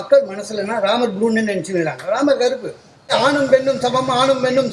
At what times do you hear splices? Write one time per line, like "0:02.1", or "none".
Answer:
0:03.1